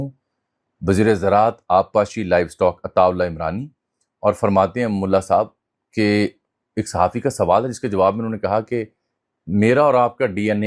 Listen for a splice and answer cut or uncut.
uncut